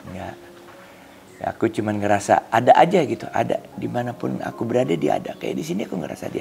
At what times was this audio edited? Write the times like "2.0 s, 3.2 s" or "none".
none

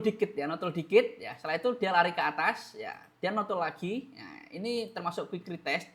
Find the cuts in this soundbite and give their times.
none

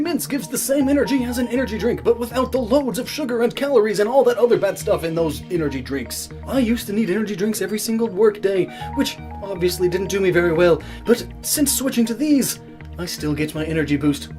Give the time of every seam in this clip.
12.0 s

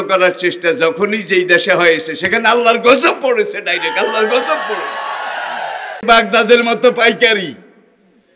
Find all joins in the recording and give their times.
6.0 s

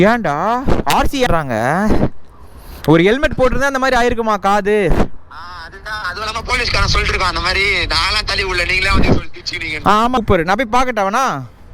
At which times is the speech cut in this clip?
1.3 s, 10.2 s

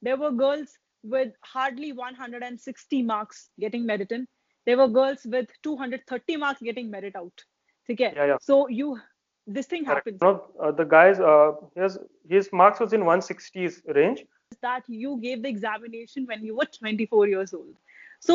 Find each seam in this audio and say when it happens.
10.2 s, 14.5 s

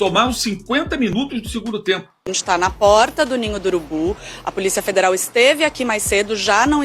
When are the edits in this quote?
2.4 s

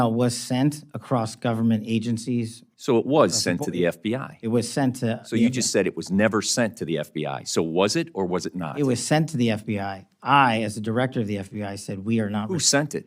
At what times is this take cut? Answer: none

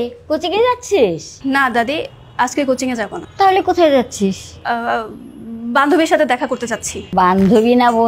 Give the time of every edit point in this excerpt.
1.3 s, 3.2 s, 4.5 s, 6.9 s

